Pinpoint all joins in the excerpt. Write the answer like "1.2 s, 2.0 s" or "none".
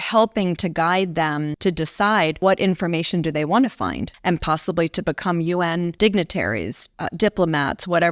1.5 s, 2.4 s, 4.1 s, 5.9 s, 6.8 s